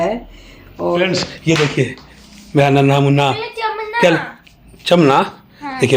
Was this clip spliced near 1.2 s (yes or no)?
yes